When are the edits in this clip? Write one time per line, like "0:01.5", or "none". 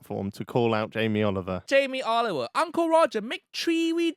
0:01.6